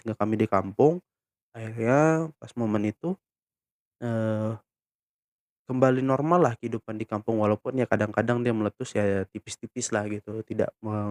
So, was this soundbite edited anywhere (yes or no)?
no